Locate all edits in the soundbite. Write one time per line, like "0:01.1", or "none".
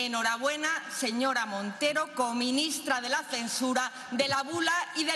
none

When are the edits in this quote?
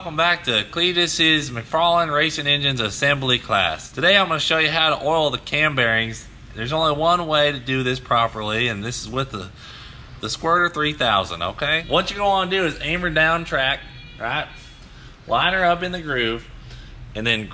0:03.9
0:11.8

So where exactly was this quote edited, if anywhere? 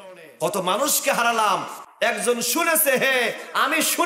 none

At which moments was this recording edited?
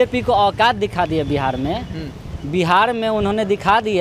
none

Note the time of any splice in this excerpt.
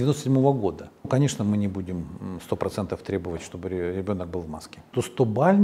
0:01.1
0:04.9

